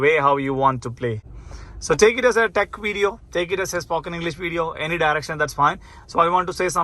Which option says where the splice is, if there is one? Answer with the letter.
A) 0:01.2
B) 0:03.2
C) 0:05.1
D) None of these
A